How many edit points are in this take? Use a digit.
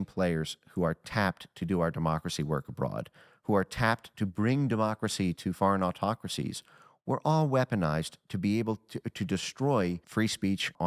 0